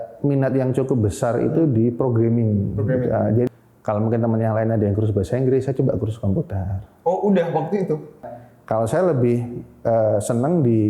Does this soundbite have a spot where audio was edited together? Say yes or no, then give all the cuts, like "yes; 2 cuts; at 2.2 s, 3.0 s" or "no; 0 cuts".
yes; 2 cuts; at 3.5 s, 8.2 s